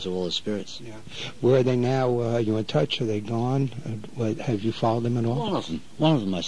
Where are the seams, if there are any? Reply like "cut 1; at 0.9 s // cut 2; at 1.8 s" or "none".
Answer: cut 1; at 2.3 s